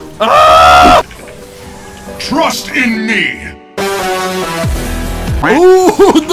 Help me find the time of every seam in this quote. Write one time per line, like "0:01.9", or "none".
0:01.1